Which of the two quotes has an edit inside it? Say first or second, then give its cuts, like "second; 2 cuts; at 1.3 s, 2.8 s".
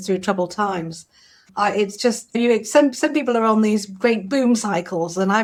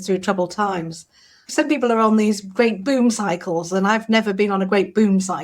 second; 1 cut; at 1.5 s